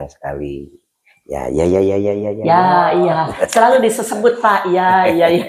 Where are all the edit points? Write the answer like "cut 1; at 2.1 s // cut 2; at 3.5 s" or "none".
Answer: none